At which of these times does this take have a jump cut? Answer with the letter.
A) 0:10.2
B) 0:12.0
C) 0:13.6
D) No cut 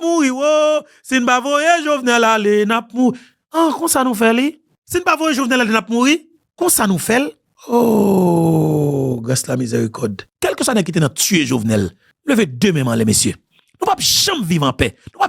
A